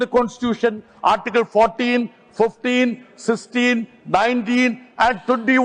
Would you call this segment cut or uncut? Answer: uncut